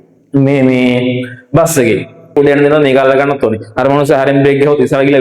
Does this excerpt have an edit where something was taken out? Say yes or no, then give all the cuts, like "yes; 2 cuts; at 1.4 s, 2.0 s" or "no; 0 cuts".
yes; 1 cut; at 2.3 s